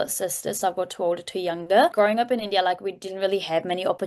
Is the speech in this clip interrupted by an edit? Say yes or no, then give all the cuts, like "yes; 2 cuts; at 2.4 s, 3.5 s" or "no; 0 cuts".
yes; 1 cut; at 1.9 s